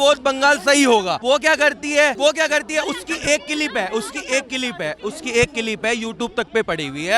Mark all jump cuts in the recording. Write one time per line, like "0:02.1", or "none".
0:01.2
0:02.2